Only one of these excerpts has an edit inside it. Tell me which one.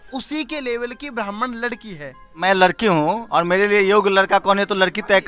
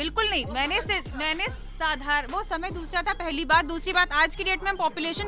first; 1 cut; at 2.3 s

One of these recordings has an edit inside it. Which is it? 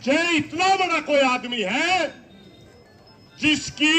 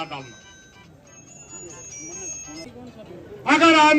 second; 1 cut; at 2.7 s

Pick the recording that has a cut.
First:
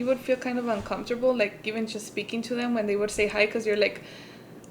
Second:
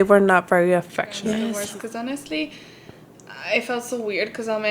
second; 1 cut; at 1.2 s

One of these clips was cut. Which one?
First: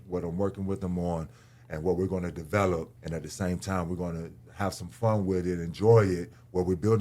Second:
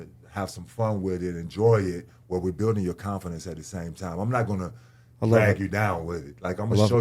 first; 1 cut; at 3.0 s

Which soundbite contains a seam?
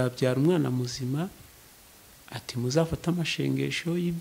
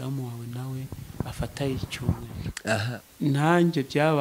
second; 1 cut; at 2.8 s

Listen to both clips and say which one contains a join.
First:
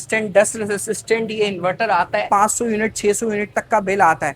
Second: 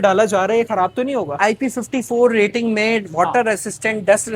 first; 1 cut; at 2.3 s

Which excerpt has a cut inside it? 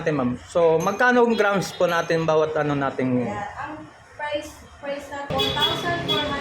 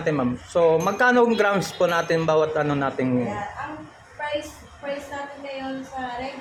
first; 1 cut; at 5.3 s

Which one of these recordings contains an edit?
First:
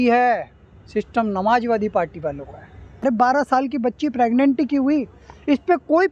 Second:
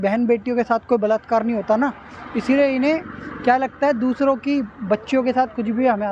first; 1 cut; at 3.0 s

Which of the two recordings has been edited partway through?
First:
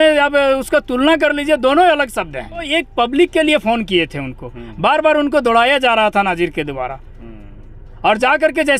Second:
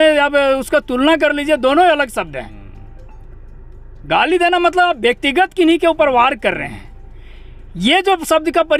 first; 1 cut; at 2.7 s

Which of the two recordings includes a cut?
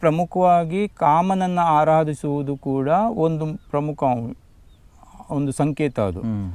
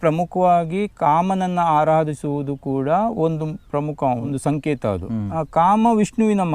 second; 2 cuts; at 4.3 s, 5.3 s

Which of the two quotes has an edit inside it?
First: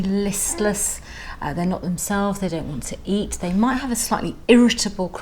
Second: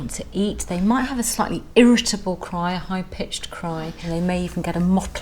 second; 1 cut; at 4.0 s

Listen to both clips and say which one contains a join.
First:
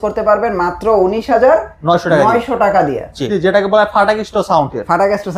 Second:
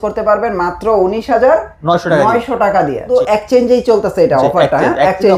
first; 1 cut; at 3.2 s

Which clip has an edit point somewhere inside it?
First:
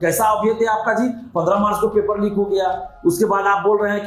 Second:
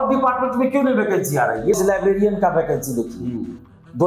second; 1 cut; at 1.7 s

